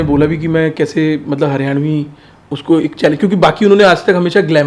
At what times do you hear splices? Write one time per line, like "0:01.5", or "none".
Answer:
none